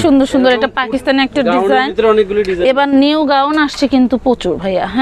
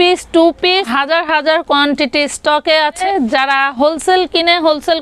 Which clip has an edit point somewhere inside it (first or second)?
second